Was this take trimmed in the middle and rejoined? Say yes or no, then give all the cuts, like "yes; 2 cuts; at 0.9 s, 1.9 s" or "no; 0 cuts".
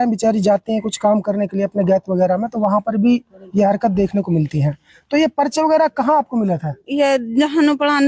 no; 0 cuts